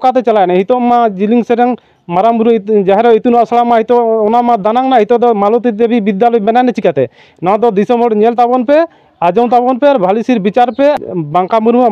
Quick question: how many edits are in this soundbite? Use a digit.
1